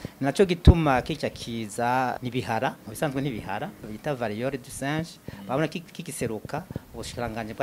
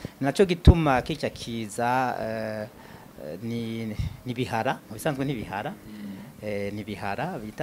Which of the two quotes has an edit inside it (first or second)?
first